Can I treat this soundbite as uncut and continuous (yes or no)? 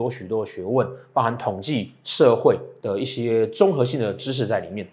no